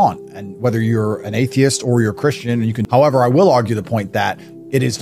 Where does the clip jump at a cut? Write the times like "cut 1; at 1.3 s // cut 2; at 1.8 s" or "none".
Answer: cut 1; at 2.8 s